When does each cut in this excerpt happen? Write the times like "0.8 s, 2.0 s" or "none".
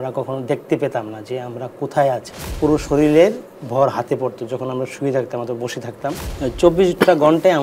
2.4 s, 6.3 s